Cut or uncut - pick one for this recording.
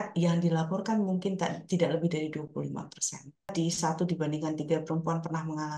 cut